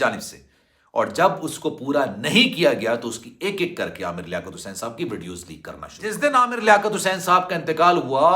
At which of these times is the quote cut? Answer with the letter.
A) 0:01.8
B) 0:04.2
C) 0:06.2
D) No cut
C